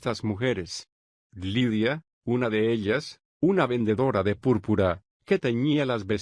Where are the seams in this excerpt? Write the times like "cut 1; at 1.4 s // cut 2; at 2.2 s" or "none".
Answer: cut 1; at 3.3 s